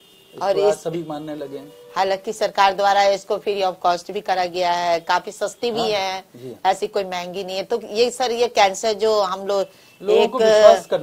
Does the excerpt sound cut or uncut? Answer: uncut